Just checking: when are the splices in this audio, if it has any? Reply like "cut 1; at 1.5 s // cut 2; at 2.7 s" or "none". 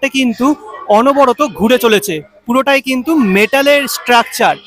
none